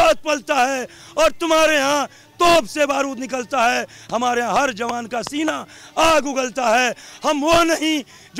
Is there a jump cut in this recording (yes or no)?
no